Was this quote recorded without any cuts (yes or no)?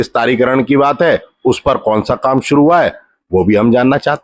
yes